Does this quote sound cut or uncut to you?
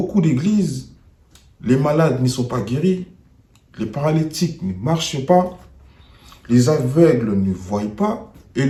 uncut